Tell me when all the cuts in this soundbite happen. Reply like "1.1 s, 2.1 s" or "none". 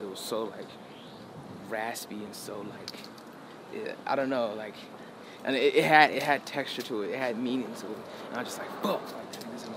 none